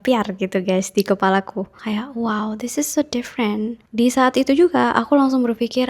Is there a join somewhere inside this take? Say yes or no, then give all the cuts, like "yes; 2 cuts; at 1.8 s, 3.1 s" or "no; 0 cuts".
yes; 1 cut; at 1.8 s